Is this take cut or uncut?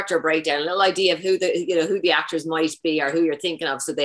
uncut